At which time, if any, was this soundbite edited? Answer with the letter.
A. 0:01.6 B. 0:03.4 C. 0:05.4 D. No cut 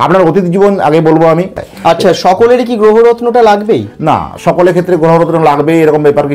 A